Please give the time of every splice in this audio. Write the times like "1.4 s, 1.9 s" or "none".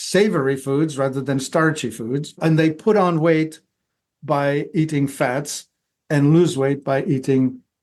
2.4 s